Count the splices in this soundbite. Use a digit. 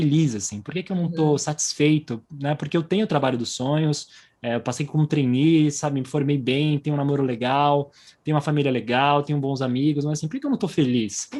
0